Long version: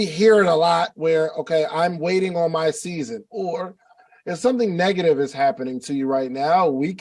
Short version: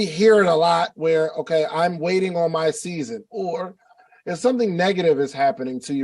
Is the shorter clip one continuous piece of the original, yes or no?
yes